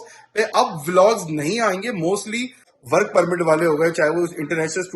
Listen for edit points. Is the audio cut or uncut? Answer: cut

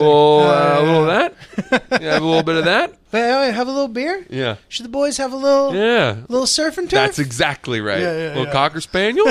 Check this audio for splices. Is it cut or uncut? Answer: cut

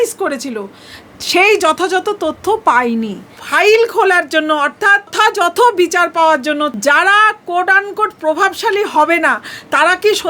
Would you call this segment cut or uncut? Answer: cut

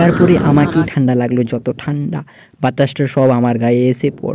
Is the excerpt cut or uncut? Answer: uncut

